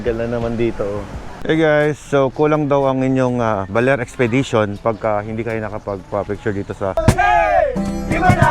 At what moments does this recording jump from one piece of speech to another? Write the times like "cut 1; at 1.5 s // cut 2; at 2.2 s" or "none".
cut 1; at 1.4 s // cut 2; at 7.0 s